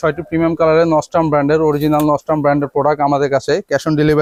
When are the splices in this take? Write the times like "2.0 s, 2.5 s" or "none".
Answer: none